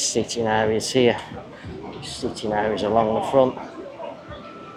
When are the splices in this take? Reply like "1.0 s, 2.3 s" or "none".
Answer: none